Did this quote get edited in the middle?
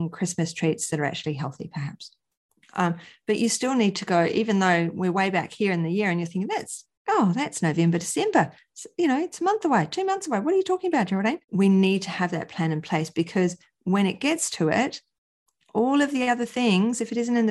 yes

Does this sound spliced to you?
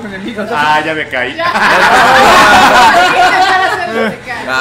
no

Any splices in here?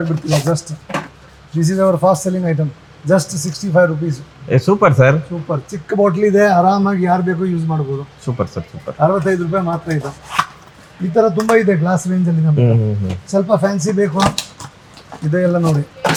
no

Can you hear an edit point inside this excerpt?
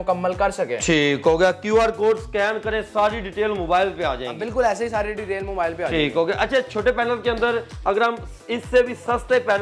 no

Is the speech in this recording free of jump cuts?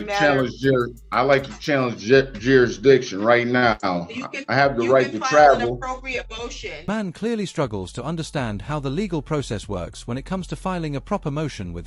yes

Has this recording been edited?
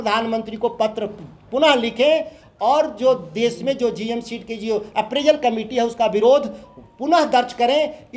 no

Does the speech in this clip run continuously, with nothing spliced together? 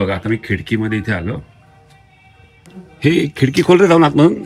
no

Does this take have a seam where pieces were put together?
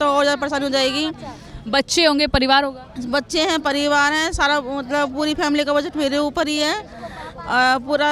no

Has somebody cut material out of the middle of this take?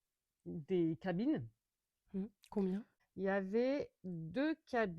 yes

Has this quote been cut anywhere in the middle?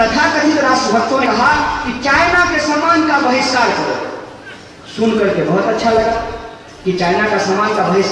yes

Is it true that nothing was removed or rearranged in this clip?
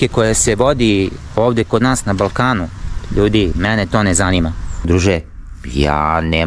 no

